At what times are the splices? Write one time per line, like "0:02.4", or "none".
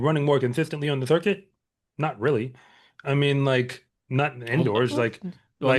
none